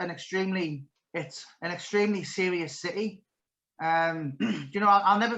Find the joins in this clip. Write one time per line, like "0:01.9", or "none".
0:00.9